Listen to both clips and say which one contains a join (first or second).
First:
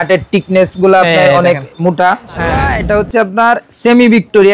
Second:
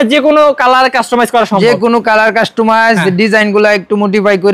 first